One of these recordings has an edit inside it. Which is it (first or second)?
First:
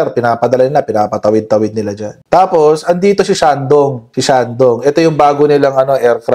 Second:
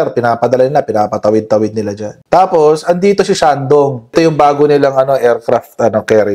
second